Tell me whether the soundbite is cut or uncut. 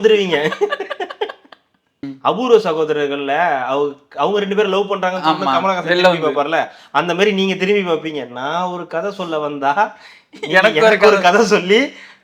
cut